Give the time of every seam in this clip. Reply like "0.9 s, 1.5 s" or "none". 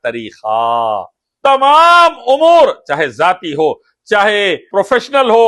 1.2 s